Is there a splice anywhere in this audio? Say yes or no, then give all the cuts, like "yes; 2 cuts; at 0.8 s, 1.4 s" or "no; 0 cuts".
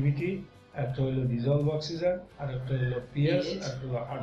no; 0 cuts